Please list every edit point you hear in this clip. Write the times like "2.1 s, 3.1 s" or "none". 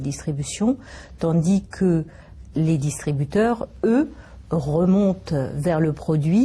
2.4 s